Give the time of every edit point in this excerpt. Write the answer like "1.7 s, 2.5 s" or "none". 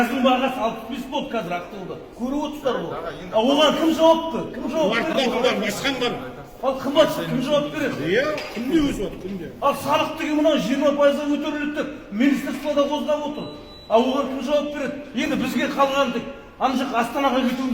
none